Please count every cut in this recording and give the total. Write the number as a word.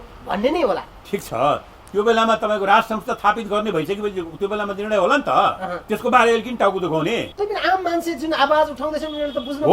two